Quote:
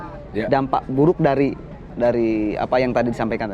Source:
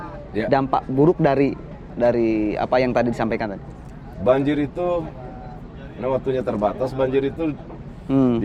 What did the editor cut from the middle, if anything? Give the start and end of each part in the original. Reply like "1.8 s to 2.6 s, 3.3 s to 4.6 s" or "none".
none